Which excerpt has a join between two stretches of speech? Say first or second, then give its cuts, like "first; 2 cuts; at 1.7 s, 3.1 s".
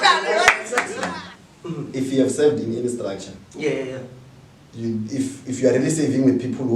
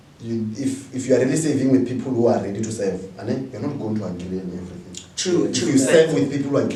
first; 1 cut; at 1.0 s